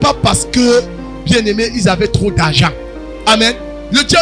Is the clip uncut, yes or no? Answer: yes